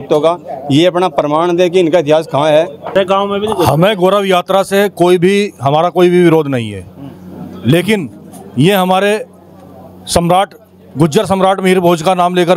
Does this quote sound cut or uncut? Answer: cut